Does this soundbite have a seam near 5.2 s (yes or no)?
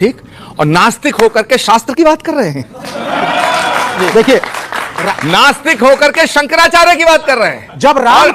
no